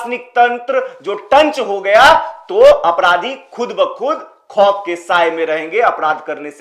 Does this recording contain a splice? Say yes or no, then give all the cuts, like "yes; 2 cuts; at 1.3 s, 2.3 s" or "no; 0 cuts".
no; 0 cuts